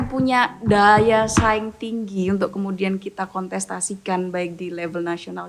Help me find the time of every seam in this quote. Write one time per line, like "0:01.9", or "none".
none